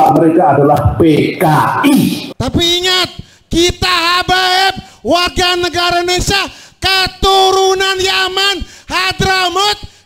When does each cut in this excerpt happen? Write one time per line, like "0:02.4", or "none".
0:02.2